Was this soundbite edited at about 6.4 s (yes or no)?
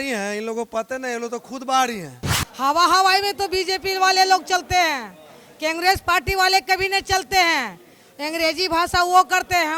no